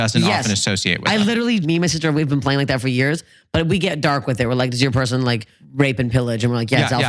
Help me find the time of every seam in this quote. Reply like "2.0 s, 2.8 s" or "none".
1.6 s, 5.5 s